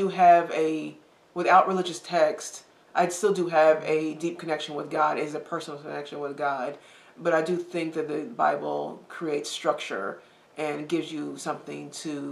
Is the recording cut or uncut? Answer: uncut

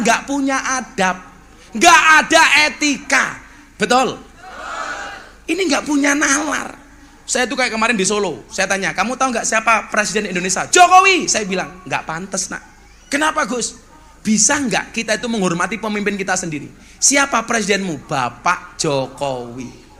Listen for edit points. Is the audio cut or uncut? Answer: uncut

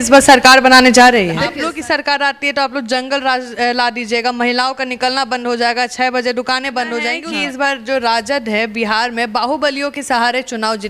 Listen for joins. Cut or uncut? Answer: cut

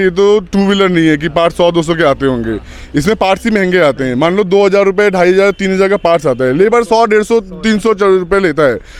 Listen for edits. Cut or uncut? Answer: uncut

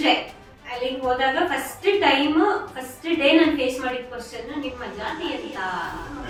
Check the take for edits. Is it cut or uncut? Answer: uncut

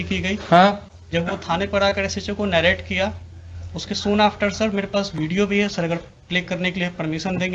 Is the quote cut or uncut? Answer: uncut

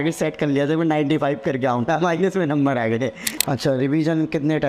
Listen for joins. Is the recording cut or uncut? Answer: cut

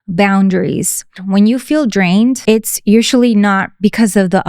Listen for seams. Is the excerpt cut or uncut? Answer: cut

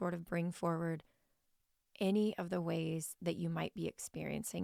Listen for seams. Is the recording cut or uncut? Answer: uncut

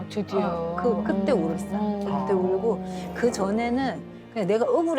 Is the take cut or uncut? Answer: uncut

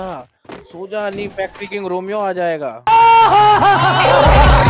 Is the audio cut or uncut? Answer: uncut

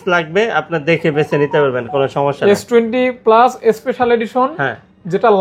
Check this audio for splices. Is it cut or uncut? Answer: uncut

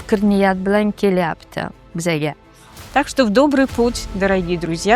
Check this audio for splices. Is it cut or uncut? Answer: cut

